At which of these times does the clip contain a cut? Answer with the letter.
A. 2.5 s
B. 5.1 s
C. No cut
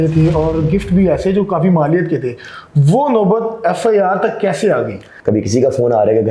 B